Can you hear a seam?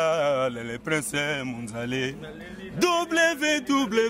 no; 0 cuts

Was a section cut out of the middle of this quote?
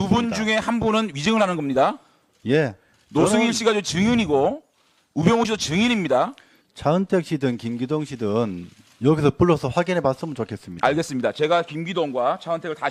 yes; 1 cut; at 5.8 s

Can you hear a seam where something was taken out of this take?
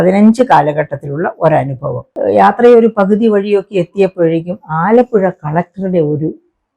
yes; 1 cut; at 2.1 s

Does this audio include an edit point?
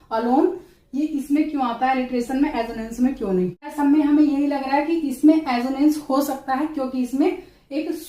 yes; 1 cut; at 3.7 s

